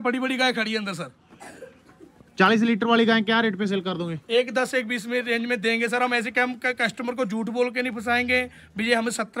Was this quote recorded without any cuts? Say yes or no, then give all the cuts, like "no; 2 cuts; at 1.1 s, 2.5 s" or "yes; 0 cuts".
yes; 0 cuts